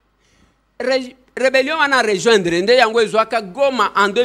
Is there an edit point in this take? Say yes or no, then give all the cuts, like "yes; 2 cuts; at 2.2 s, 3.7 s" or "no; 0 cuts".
no; 0 cuts